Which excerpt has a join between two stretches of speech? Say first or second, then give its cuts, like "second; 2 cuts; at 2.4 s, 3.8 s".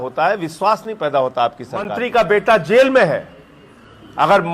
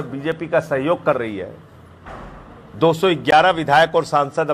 first; 1 cut; at 2.0 s